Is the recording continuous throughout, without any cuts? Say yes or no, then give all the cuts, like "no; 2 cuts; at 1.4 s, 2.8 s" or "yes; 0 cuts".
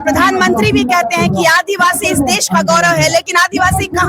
yes; 0 cuts